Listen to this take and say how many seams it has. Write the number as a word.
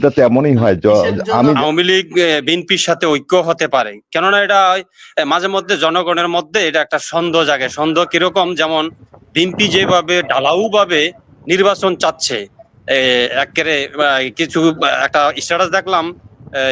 one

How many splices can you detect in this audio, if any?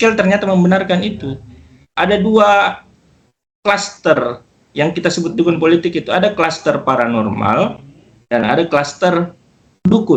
zero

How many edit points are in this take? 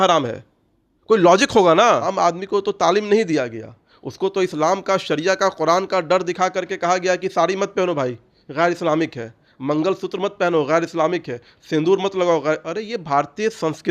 one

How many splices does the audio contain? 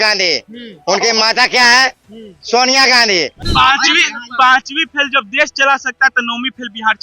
one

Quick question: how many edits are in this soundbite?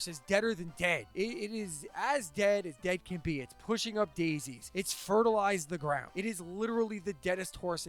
three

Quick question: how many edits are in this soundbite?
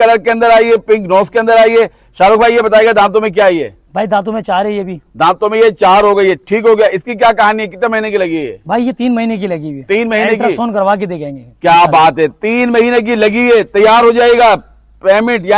zero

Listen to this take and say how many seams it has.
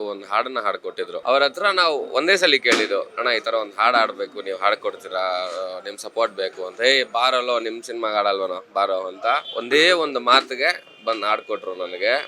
two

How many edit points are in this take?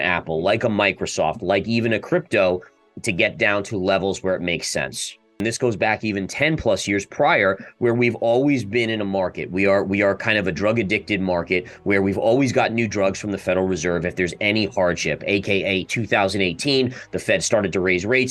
one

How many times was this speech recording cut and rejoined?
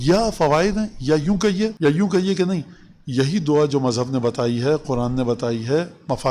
one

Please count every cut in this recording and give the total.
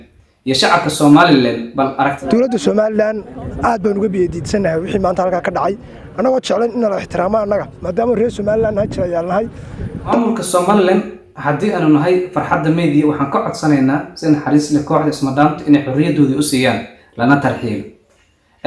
three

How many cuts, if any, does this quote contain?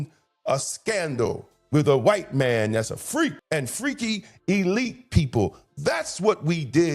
zero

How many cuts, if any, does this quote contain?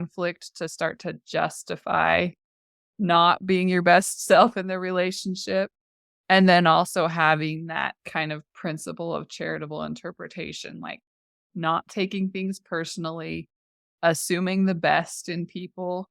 one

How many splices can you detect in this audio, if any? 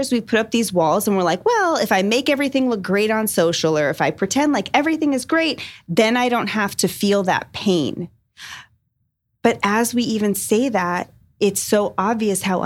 zero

